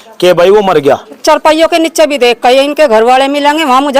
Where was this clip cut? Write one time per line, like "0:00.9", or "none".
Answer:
0:01.1